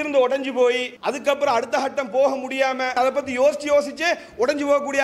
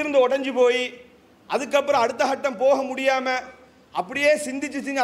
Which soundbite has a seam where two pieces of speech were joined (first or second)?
first